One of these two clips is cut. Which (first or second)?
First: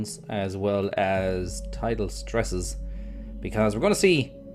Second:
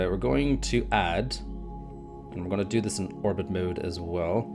first